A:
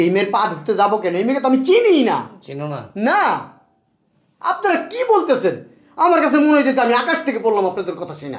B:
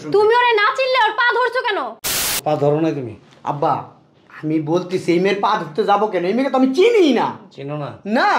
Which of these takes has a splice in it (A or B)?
B